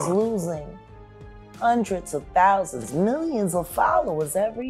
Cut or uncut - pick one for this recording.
uncut